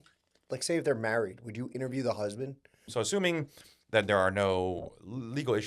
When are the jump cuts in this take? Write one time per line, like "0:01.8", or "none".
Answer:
0:02.9